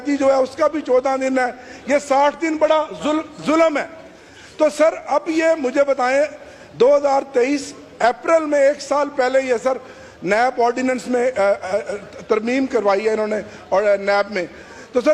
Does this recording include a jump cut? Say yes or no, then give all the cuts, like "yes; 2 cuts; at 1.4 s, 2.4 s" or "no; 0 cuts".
no; 0 cuts